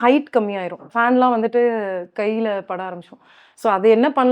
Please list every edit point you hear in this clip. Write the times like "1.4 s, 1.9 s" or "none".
0.9 s